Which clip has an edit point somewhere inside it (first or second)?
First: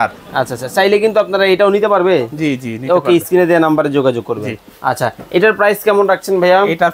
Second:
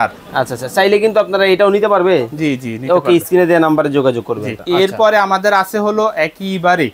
second